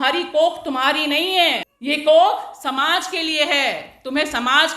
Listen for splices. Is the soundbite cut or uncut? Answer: cut